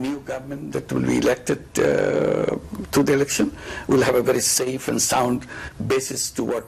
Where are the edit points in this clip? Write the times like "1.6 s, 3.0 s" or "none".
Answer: none